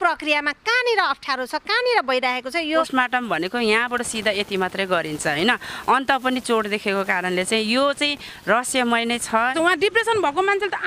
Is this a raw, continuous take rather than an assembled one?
no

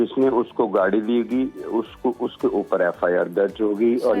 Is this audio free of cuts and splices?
yes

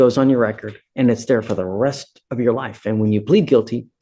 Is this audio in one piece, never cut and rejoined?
yes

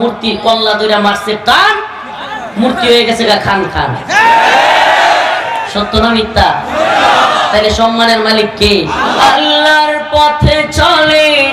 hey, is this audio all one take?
no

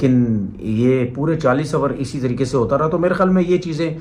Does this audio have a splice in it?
no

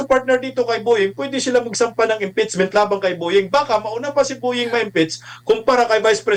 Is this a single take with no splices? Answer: yes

